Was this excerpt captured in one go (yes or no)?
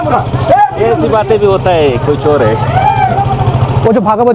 yes